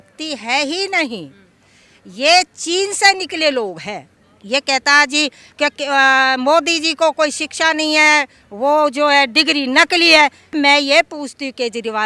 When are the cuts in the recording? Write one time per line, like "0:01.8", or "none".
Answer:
0:04.1